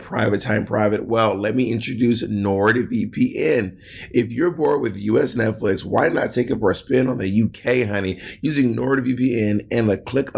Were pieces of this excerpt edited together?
no; 0 cuts

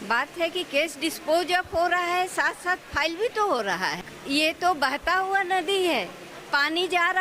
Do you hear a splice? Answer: yes; 1 cut; at 4.0 s

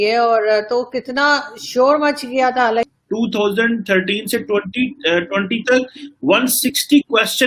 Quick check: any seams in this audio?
yes; 1 cut; at 2.9 s

